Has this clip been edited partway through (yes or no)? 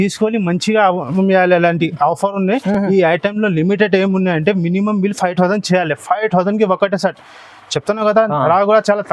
no